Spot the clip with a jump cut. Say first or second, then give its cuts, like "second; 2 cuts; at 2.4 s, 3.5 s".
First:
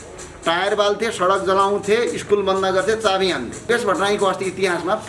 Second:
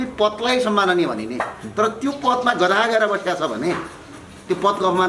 first; 1 cut; at 3.7 s